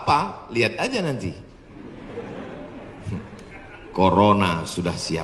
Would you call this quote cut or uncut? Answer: uncut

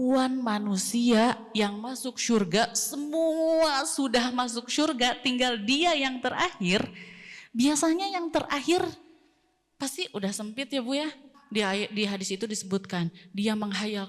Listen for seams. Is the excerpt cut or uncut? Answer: cut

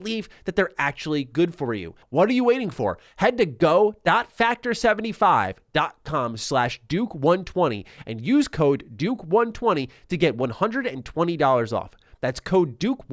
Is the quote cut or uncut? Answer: cut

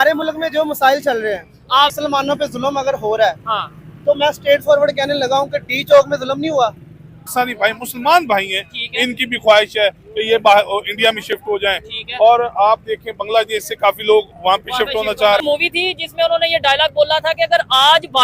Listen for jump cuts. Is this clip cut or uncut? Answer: cut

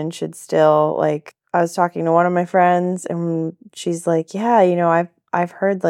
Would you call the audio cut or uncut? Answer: cut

